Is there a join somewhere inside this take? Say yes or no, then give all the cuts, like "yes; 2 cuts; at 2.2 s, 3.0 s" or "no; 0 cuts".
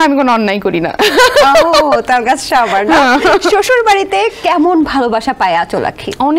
no; 0 cuts